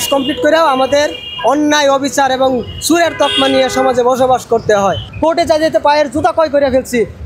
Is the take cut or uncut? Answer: cut